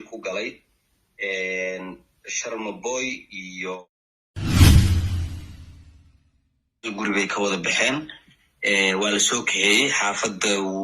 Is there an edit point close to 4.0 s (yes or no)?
yes